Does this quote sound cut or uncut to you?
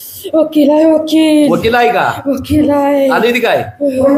uncut